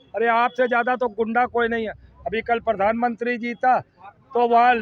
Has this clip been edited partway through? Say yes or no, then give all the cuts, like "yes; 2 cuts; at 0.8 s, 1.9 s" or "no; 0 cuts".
no; 0 cuts